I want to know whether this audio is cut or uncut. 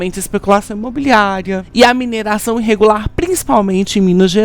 cut